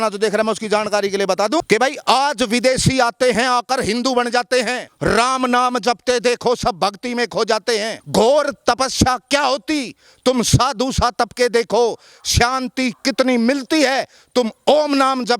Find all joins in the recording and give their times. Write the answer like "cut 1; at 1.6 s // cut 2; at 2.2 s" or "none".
cut 1; at 1.6 s // cut 2; at 4.8 s // cut 3; at 8.0 s